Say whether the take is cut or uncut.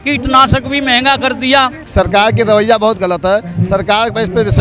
cut